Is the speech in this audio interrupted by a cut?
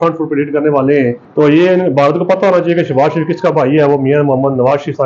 yes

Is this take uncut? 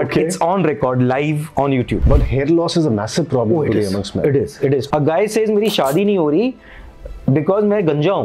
no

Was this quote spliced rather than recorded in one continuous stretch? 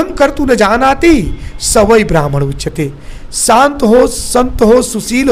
no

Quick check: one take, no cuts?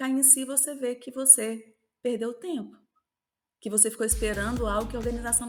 yes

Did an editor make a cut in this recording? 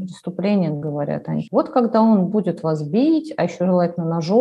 yes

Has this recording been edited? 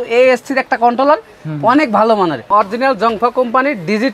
yes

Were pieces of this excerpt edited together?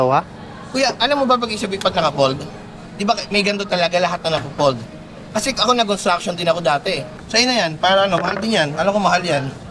yes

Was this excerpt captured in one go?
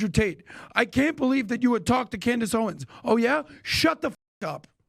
yes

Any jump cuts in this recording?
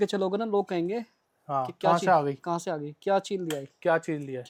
no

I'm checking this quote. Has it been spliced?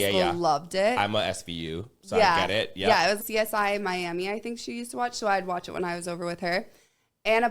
yes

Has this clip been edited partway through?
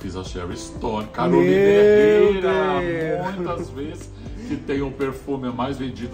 no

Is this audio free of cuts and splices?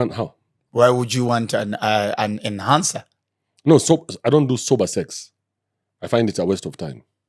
yes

